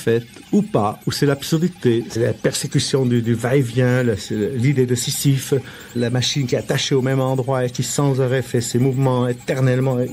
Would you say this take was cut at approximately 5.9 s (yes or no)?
yes